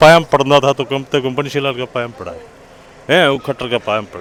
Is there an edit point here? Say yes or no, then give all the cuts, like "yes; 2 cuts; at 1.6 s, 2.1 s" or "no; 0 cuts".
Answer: no; 0 cuts